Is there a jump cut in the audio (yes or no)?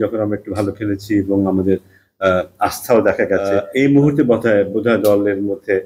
yes